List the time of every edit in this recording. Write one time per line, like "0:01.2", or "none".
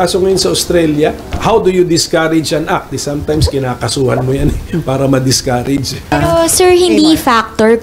0:01.4
0:06.1